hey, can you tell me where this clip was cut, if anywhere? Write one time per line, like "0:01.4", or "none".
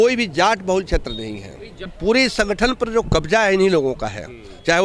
0:01.9